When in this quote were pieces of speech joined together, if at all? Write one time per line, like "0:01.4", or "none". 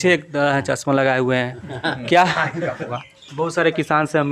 0:02.9